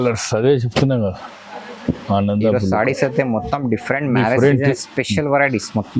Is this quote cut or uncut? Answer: uncut